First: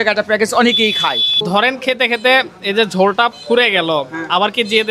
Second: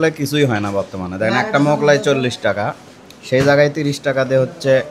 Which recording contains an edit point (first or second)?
first